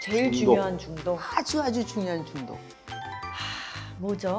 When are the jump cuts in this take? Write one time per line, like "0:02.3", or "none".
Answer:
none